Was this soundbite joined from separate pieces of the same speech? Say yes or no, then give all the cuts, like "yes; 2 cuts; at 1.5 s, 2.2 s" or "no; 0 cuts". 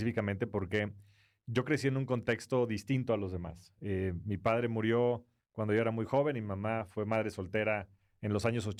no; 0 cuts